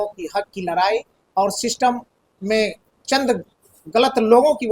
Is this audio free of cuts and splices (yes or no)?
yes